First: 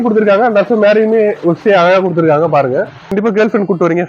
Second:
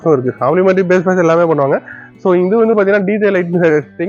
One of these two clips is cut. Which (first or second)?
first